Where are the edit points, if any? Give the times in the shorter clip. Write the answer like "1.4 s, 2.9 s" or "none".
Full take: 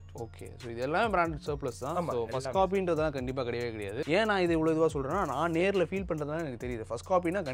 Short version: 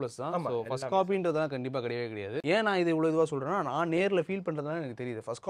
none